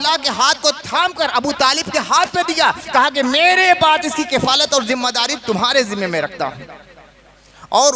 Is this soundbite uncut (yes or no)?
yes